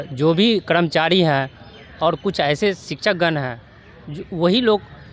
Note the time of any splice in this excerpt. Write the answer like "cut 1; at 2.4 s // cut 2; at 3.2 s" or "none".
none